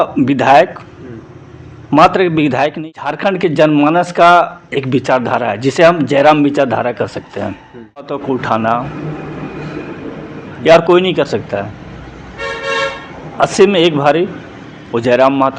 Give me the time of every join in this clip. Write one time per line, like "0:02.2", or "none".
0:02.8
0:08.2